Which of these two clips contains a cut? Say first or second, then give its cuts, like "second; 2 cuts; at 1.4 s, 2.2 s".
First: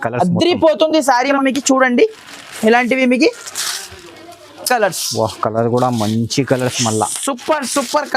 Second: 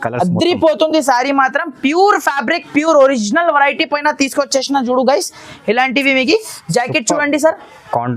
first; 1 cut; at 1.4 s